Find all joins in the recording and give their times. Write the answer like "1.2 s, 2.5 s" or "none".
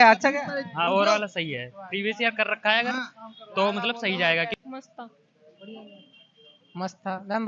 4.5 s